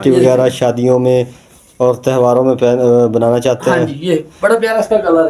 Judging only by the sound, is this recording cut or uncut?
uncut